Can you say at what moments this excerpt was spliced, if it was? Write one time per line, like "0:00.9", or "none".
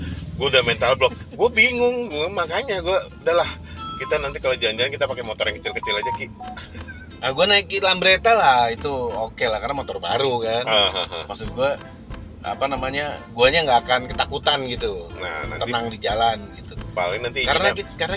none